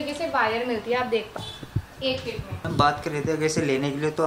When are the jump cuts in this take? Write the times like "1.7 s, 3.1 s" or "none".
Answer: 1.4 s